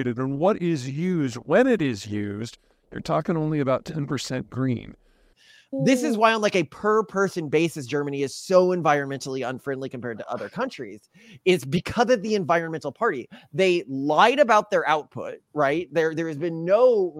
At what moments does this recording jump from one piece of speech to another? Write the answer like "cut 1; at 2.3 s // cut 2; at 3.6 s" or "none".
none